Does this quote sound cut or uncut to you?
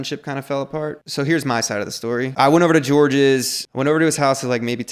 cut